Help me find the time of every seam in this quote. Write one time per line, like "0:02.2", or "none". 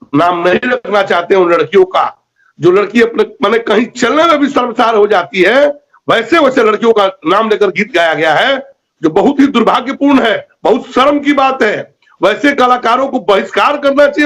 none